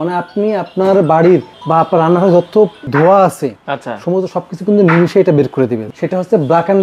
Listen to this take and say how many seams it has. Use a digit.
2